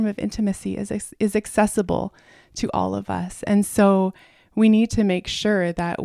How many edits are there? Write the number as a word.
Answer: zero